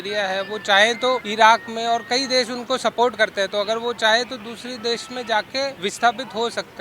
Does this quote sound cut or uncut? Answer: cut